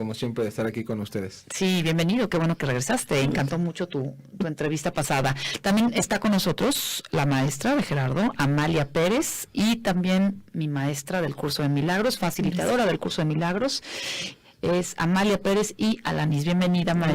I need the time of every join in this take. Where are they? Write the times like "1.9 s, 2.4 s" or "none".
5.6 s